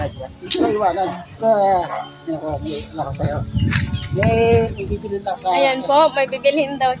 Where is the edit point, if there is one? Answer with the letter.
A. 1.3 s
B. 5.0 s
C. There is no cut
A